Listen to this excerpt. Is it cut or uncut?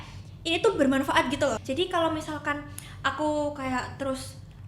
cut